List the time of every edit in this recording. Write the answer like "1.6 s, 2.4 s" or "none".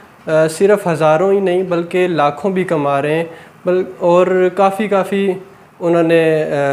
none